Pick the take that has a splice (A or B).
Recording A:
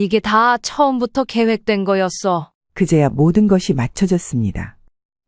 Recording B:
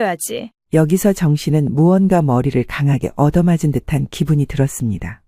A